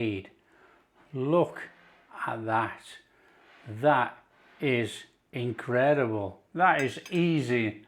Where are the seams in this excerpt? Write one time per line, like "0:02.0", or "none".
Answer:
0:06.4